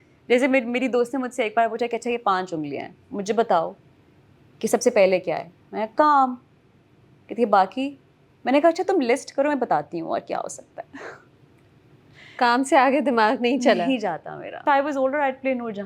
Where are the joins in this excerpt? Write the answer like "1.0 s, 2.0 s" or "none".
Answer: 14.6 s

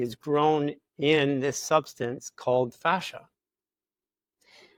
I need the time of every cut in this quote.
none

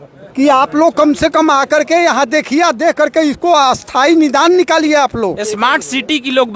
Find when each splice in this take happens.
5.4 s

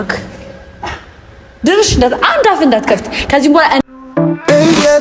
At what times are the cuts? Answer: 4.0 s

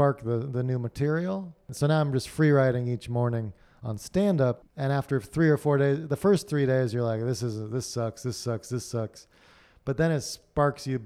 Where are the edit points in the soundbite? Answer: 1.7 s, 4.7 s

